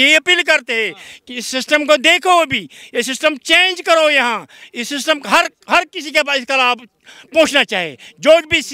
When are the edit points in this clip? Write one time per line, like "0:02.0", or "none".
none